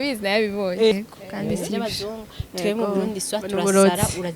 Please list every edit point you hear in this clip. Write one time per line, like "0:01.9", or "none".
0:00.9